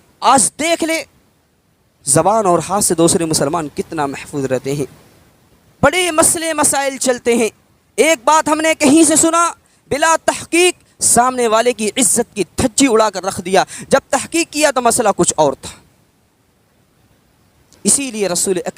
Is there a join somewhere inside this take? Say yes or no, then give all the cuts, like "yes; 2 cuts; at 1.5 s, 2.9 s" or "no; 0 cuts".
no; 0 cuts